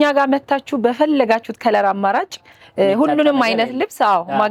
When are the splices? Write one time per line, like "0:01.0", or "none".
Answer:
none